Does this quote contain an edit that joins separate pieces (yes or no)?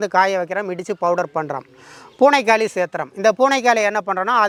no